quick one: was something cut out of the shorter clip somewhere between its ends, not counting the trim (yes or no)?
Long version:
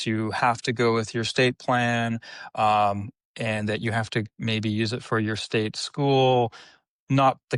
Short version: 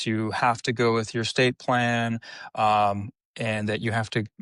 no